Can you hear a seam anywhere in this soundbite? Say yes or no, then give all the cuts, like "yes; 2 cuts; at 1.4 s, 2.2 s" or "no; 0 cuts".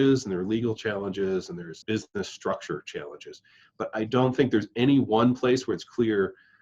yes; 1 cut; at 1.8 s